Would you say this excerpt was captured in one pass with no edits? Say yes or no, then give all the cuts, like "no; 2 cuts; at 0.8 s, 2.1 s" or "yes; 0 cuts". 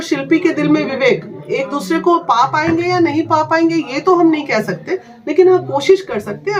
yes; 0 cuts